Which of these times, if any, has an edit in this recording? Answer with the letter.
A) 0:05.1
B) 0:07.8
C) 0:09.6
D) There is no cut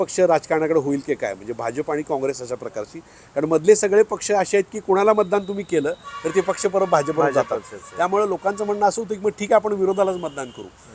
D